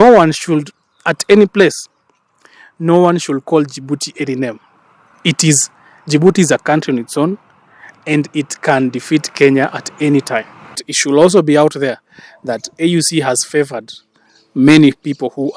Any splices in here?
yes; 1 cut; at 10.9 s

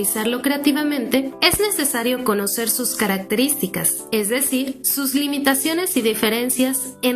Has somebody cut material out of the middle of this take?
yes; 3 cuts; at 1.3 s, 3.9 s, 4.8 s

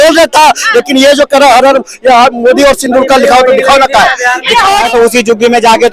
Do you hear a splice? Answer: yes; 1 cut; at 4.9 s

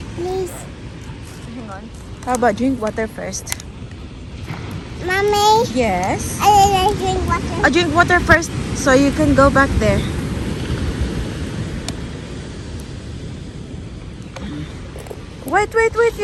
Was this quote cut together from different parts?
no; 0 cuts

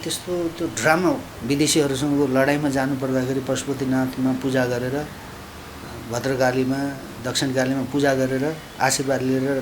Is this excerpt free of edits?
no; 1 cut; at 1.3 s

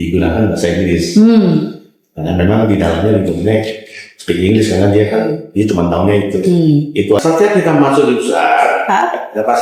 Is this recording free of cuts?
no; 1 cut; at 7.2 s

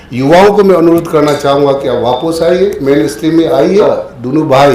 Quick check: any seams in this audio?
yes; 1 cut; at 3.8 s

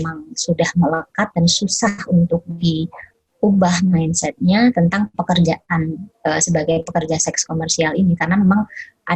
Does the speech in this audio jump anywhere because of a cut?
no; 0 cuts

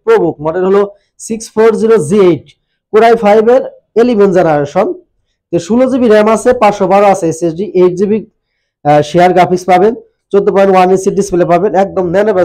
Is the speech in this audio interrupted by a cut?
no; 0 cuts

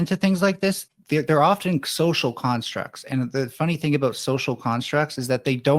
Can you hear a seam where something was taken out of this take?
yes; 1 cut; at 0.9 s

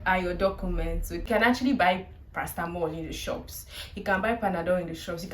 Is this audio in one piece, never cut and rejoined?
no; 1 cut; at 1.3 s

